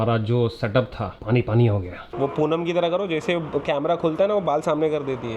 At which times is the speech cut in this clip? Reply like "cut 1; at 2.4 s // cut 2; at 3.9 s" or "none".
cut 1; at 2.1 s